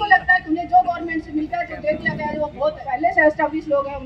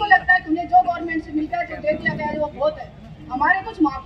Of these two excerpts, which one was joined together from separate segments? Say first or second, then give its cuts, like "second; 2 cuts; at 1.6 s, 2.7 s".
first; 1 cut; at 2.9 s